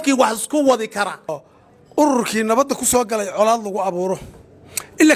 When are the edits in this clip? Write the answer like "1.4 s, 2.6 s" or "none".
1.4 s